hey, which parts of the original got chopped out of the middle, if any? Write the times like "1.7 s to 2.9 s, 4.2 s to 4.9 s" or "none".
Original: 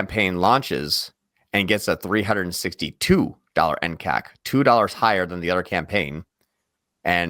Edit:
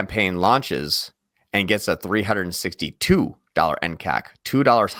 none